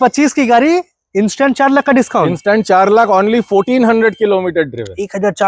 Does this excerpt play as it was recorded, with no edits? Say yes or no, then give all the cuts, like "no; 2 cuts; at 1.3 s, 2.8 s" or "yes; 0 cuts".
yes; 0 cuts